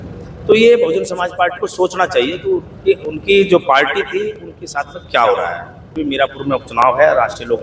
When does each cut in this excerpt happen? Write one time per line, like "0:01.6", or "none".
0:05.9